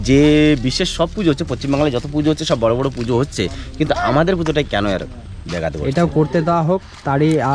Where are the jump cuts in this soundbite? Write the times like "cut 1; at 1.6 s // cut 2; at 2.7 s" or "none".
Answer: none